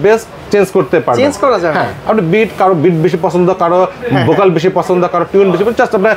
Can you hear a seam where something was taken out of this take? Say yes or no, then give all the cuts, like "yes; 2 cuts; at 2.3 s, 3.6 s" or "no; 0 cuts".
no; 0 cuts